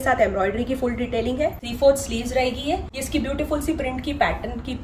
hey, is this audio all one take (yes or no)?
no